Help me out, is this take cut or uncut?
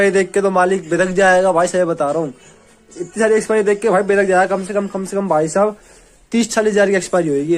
uncut